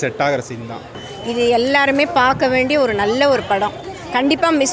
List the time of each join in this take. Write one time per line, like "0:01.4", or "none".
0:01.0